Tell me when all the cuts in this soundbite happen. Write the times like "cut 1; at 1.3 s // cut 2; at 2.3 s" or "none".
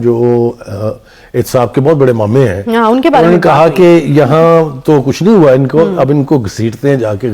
none